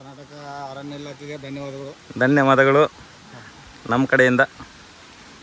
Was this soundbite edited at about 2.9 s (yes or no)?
no